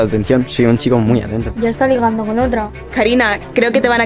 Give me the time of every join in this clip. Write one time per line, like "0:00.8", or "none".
0:01.5
0:02.8